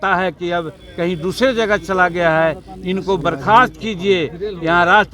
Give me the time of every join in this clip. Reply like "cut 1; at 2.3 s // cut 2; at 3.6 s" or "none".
none